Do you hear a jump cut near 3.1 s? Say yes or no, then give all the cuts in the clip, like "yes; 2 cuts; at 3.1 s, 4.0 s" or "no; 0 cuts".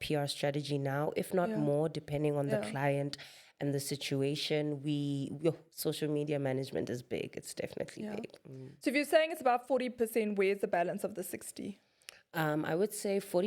no; 0 cuts